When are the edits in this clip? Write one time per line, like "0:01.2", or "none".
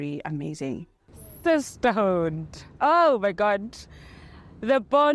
0:01.0